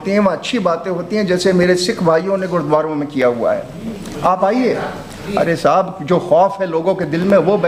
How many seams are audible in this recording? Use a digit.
0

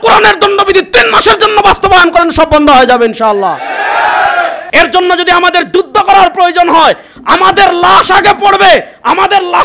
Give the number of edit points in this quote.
2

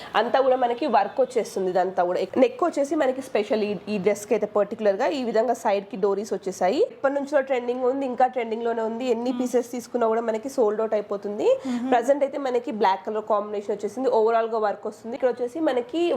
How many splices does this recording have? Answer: 3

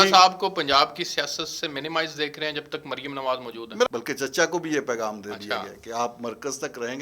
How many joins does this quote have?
1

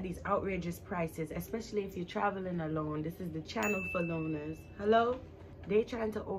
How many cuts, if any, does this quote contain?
0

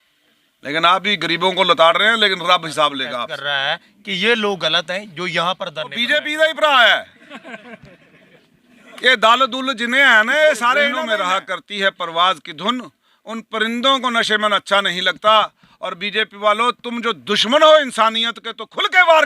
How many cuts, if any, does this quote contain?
3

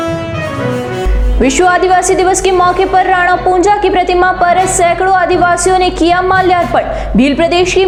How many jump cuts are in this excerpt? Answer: 0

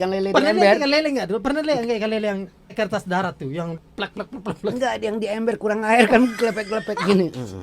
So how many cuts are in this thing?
2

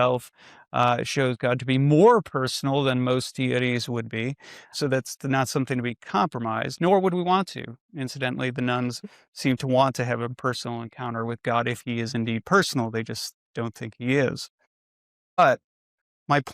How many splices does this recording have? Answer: 1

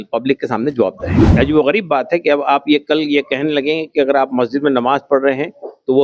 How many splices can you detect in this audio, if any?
1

